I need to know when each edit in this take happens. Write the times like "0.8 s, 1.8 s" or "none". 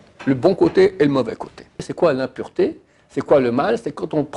1.9 s

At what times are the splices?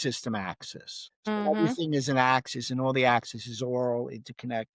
1.5 s

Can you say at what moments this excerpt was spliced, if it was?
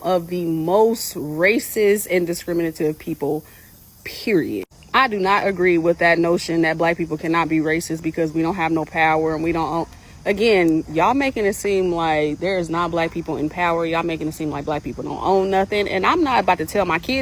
12.7 s

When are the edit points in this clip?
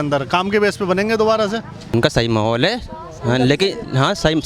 1.9 s

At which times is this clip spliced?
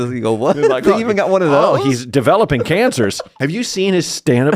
3.3 s

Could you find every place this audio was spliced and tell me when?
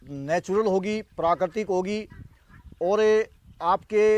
none

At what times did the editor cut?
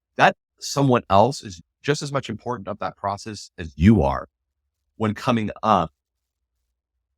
1.6 s

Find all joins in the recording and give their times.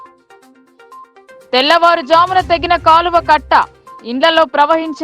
1.1 s

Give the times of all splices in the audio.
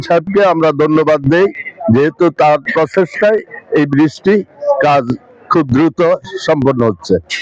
none

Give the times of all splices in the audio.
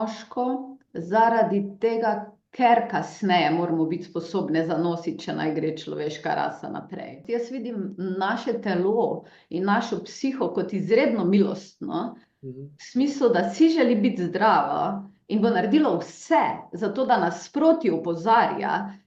7.2 s

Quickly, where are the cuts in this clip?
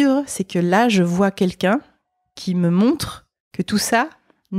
none

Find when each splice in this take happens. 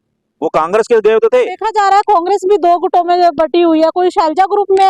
1.6 s

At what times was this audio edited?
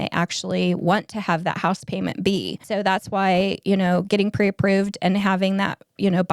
2.6 s

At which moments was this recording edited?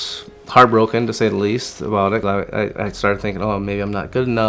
2.2 s

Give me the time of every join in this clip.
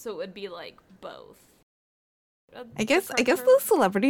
1.8 s

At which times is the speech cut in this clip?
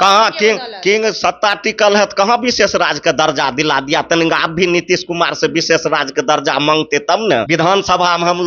7.5 s

